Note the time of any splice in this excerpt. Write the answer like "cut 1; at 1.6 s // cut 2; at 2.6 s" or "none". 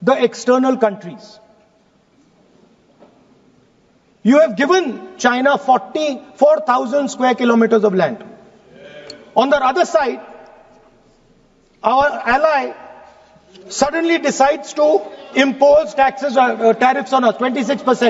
none